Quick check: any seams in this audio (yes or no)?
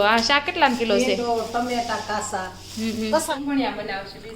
yes